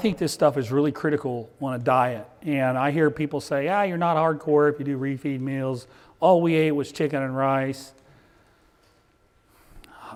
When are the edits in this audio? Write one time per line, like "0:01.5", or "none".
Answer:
none